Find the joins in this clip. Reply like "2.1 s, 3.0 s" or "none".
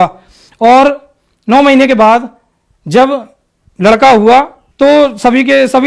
4.6 s